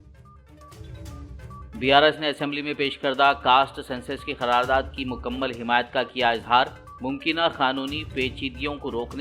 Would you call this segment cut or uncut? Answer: cut